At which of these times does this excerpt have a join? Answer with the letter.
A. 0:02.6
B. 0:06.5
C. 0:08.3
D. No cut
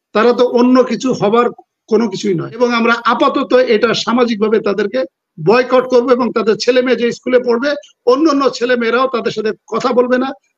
A